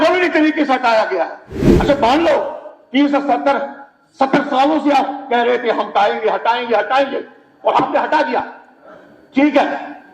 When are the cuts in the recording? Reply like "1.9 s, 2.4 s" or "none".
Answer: 1.6 s